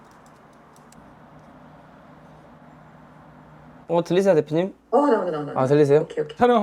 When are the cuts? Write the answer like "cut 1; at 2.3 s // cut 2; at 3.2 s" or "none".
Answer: cut 1; at 0.9 s // cut 2; at 3.8 s